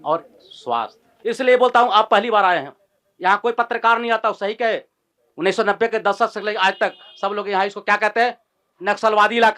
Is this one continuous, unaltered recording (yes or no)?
no